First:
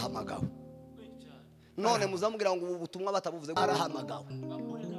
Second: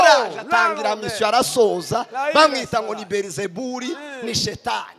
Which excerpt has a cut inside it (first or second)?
first